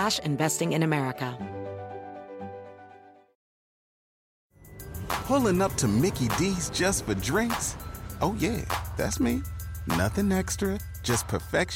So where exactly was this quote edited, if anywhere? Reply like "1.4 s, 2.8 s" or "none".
1.3 s